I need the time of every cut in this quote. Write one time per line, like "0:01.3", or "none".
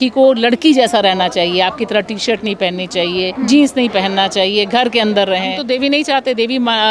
0:03.3
0:05.6